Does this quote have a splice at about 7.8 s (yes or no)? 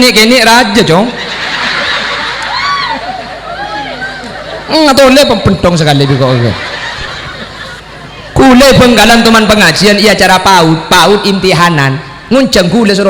yes